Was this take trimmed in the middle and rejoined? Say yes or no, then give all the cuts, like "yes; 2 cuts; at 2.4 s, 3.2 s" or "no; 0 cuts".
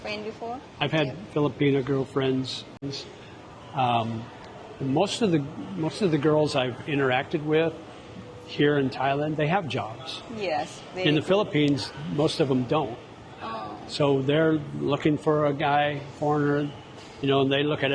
yes; 1 cut; at 2.8 s